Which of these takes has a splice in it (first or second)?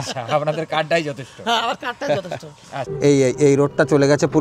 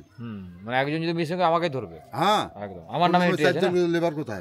first